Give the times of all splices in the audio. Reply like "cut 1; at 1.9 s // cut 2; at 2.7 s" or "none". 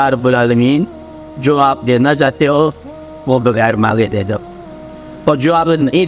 none